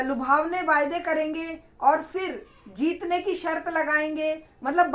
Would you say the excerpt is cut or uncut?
uncut